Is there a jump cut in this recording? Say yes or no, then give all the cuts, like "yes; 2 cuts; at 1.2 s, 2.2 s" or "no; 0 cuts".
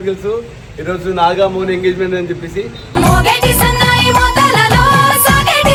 no; 0 cuts